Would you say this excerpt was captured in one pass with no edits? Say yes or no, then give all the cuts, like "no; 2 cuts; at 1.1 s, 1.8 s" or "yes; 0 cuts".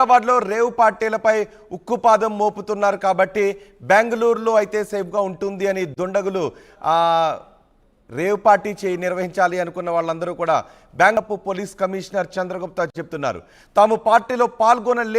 no; 1 cut; at 11.2 s